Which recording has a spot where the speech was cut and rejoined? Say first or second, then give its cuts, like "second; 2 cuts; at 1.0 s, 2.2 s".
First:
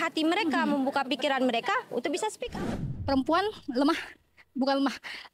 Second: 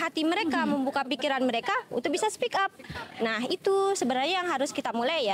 first; 1 cut; at 2.5 s